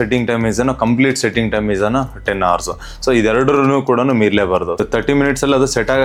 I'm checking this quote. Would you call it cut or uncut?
uncut